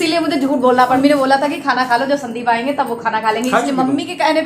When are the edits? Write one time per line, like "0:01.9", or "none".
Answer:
0:01.0